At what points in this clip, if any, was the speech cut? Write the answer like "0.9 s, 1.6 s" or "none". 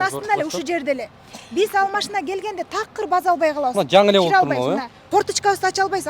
4.9 s